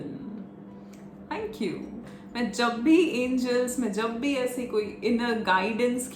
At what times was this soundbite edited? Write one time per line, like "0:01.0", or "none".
none